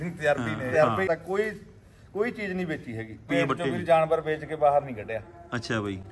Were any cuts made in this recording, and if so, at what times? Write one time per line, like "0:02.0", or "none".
0:01.1
0:03.3